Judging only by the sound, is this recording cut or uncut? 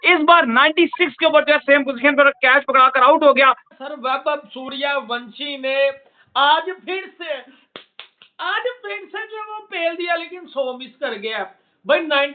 cut